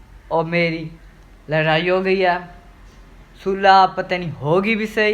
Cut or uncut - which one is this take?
uncut